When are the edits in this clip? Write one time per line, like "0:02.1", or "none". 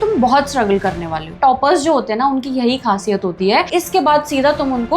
0:01.3
0:03.7